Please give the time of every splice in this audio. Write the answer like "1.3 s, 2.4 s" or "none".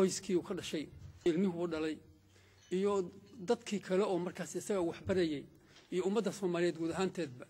1.1 s